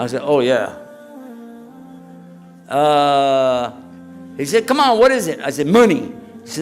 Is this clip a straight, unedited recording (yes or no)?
no